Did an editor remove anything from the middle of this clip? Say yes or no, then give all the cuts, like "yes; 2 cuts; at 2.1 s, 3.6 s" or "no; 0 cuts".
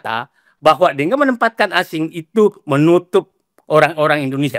no; 0 cuts